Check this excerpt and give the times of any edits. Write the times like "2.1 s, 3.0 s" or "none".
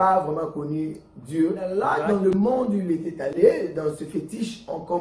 1.7 s